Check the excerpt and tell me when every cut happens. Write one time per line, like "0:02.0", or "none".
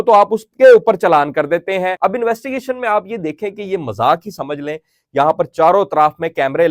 0:01.9
0:05.0